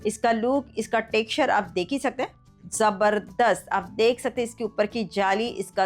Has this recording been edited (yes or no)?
yes